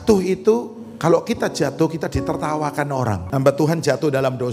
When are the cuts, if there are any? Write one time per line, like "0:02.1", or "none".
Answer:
0:03.2